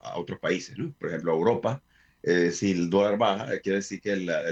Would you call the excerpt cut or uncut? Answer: uncut